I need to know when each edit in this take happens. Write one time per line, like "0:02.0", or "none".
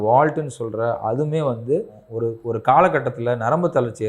0:02.0